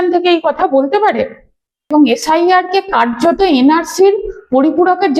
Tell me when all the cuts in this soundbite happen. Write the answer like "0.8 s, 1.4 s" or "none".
1.9 s